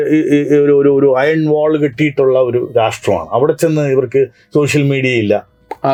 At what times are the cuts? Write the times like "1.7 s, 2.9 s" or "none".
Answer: none

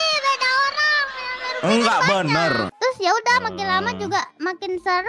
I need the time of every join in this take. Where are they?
2.7 s

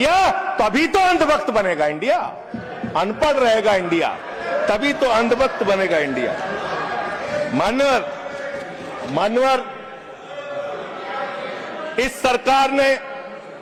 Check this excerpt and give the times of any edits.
none

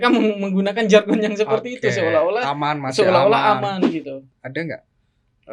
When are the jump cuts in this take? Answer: 4.2 s

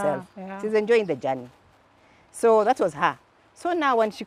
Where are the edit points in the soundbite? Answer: none

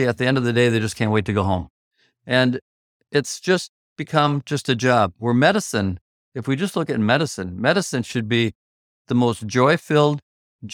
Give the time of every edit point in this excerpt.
none

